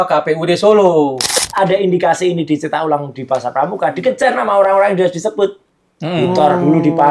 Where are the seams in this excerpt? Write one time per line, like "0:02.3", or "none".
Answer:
0:01.4